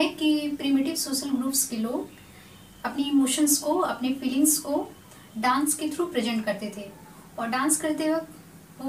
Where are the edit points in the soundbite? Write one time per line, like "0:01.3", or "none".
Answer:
none